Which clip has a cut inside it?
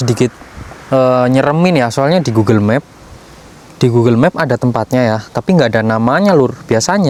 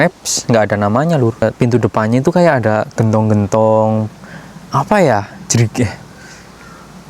second; 1 cut; at 1.4 s

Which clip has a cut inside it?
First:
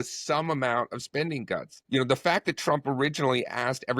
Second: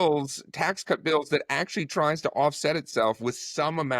first; 1 cut; at 1.7 s

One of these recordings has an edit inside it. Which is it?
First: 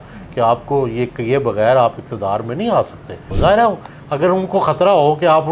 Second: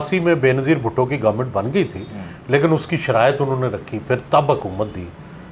first; 1 cut; at 3.3 s

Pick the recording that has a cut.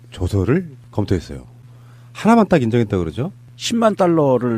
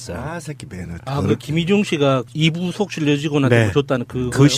first; 1 cut; at 1.6 s

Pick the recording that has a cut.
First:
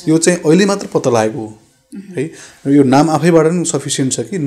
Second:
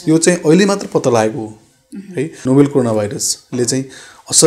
second; 1 cut; at 2.3 s

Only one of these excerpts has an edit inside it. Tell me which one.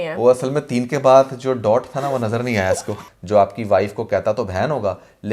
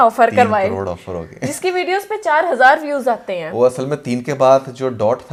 first; 1 cut; at 3.0 s

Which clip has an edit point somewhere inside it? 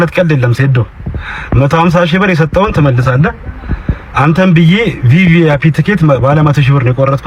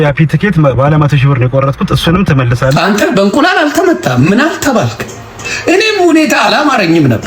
second; 1 cut; at 2.7 s

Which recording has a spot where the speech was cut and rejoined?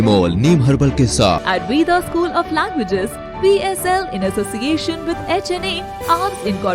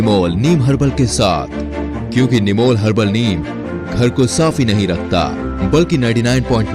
first; 1 cut; at 1.4 s

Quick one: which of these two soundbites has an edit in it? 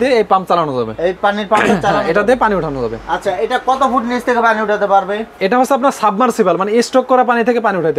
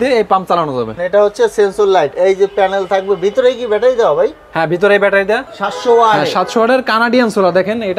second; 2 cuts; at 0.9 s, 5.5 s

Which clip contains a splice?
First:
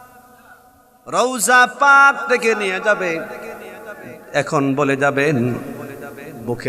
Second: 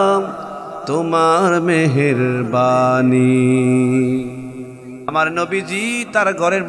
second; 1 cut; at 5.1 s

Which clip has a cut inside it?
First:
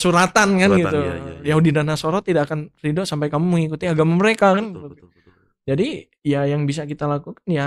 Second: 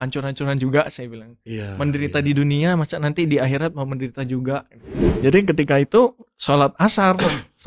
second; 1 cut; at 5.0 s

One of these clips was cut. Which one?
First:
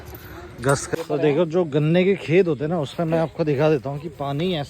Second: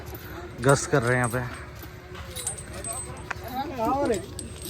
first; 1 cut; at 0.9 s

